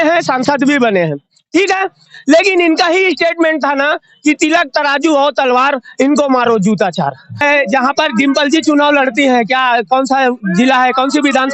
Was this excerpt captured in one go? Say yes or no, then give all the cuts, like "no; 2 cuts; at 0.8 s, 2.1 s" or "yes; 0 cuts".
no; 1 cut; at 7.4 s